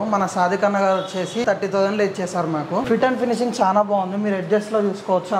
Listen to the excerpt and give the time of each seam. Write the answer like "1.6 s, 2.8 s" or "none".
1.4 s, 2.8 s